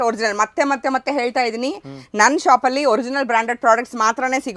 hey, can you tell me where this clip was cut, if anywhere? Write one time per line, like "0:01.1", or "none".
none